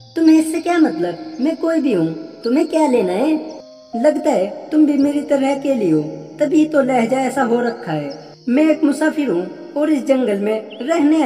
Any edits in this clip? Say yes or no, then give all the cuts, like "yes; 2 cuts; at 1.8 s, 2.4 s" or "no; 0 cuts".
no; 0 cuts